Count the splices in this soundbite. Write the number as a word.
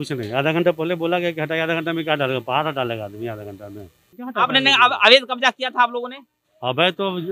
one